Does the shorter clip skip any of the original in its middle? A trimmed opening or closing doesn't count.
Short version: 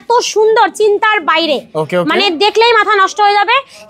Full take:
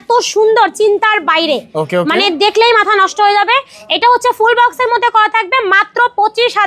no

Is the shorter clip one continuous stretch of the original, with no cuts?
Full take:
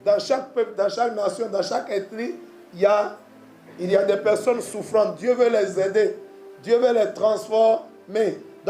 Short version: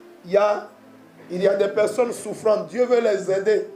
yes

